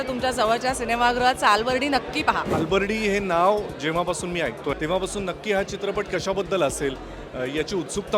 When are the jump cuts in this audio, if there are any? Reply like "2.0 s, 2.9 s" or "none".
2.6 s, 4.7 s